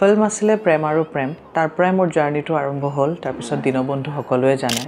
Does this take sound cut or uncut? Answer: cut